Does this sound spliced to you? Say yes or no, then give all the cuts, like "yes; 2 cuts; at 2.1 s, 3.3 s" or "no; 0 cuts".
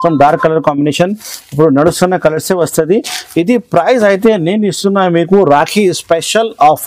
no; 0 cuts